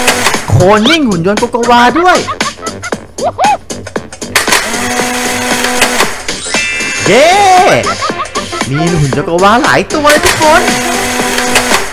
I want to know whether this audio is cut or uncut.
uncut